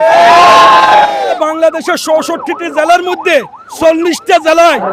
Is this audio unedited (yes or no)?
no